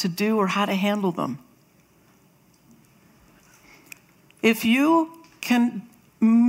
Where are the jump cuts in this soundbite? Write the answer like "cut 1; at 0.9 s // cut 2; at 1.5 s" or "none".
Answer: cut 1; at 2.9 s